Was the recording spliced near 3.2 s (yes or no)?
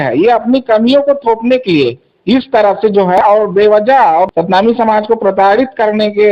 yes